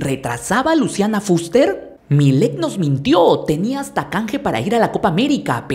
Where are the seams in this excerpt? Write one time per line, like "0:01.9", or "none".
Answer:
0:01.9